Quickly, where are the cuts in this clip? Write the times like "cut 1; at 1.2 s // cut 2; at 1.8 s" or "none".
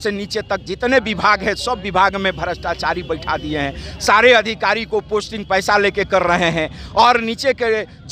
none